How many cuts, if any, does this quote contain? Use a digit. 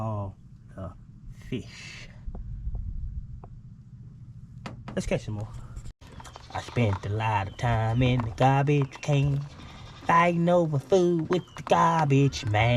1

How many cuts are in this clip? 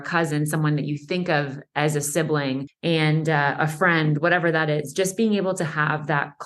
1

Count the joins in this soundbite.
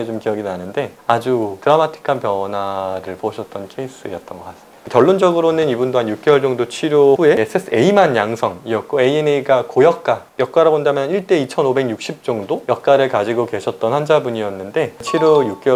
0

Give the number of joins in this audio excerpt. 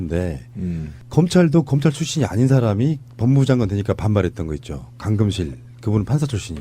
1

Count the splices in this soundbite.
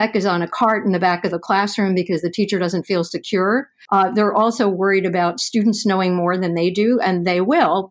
1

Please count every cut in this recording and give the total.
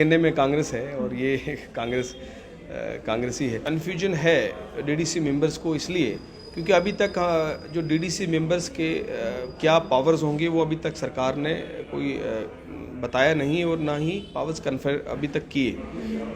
1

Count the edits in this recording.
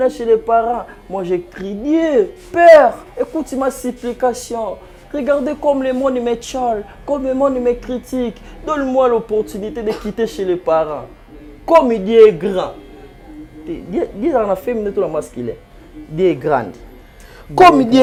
0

